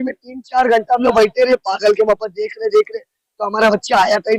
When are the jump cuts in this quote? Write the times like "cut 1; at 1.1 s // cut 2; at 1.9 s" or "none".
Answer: none